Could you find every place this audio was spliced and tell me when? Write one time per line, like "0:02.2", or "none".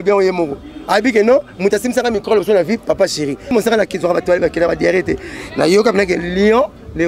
0:03.5